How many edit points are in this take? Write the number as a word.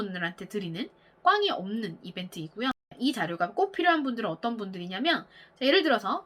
one